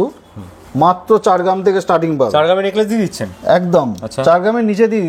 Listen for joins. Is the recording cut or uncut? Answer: uncut